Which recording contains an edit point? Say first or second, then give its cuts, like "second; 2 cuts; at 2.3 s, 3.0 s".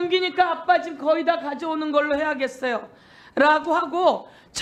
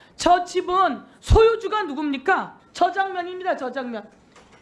second; 1 cut; at 2.6 s